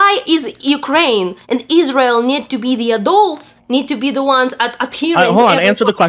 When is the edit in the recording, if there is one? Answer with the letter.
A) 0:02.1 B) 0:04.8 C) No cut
C